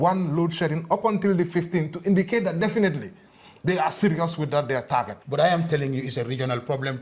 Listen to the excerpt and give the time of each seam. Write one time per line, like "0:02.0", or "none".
0:05.2